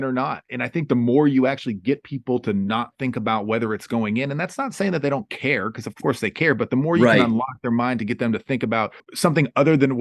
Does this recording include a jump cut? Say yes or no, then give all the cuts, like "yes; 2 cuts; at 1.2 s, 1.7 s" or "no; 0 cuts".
yes; 1 cut; at 9.0 s